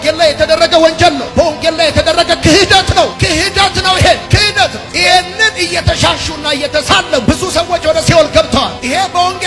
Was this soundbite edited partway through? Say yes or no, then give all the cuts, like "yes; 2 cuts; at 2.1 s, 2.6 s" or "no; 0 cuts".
no; 0 cuts